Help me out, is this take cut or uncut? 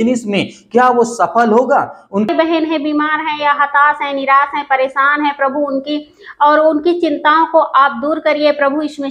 cut